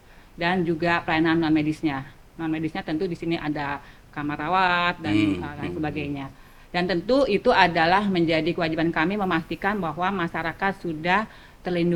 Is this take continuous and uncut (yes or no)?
yes